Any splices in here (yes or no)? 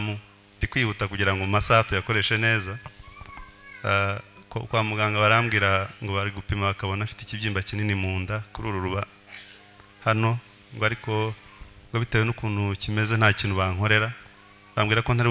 no